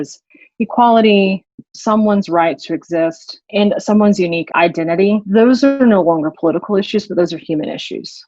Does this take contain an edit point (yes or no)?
yes